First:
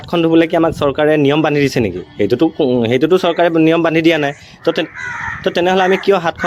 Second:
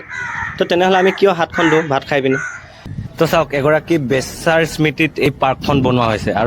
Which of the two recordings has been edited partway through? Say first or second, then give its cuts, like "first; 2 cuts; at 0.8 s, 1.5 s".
second; 1 cut; at 2.8 s